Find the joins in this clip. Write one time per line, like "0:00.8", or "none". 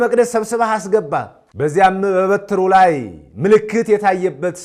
0:01.4